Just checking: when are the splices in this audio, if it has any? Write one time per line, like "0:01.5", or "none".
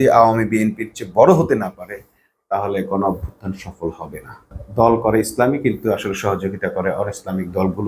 0:04.6